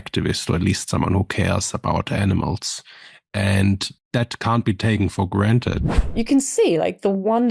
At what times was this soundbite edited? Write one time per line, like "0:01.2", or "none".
0:03.9
0:05.8